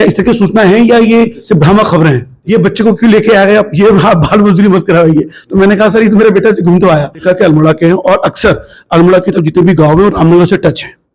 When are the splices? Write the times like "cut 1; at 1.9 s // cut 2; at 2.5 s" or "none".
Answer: cut 1; at 2.3 s // cut 2; at 7.2 s